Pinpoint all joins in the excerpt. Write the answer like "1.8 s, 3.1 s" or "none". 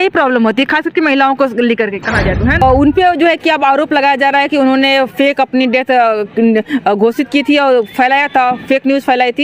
2.6 s